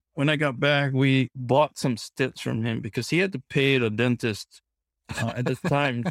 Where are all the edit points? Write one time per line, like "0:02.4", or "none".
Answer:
0:01.4